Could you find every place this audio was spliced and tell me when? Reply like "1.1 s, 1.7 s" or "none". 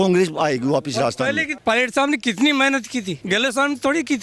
1.5 s